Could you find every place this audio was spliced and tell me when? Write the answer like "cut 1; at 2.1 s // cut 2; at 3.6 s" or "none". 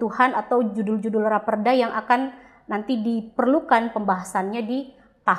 none